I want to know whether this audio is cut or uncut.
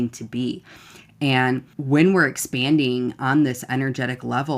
cut